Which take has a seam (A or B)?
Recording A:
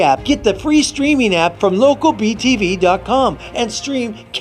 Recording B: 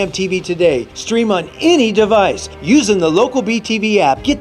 A